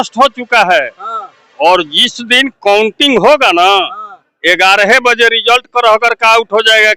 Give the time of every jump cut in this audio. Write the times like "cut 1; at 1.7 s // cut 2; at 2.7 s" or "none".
none